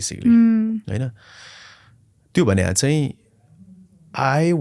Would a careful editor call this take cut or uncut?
uncut